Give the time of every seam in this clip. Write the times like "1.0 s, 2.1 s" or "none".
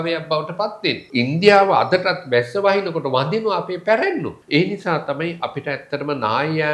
1.0 s, 4.4 s